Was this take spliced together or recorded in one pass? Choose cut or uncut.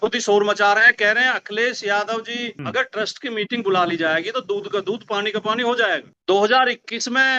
cut